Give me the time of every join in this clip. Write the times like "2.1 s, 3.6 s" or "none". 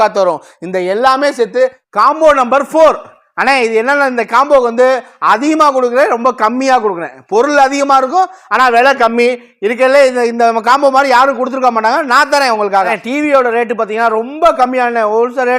1.8 s, 13.0 s